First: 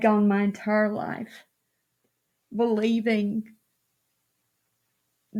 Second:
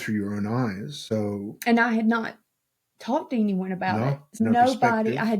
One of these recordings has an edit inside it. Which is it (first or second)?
second